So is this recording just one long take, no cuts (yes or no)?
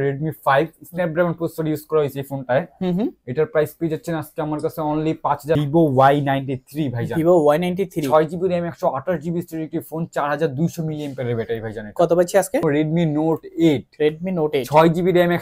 no